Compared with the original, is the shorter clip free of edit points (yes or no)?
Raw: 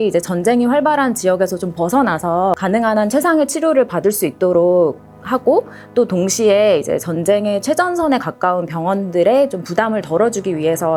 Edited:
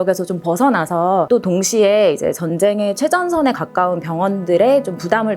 no